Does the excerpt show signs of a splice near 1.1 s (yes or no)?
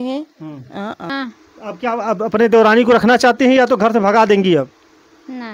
yes